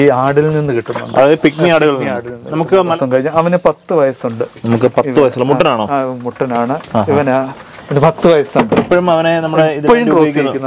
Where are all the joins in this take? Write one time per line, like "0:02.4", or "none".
0:02.9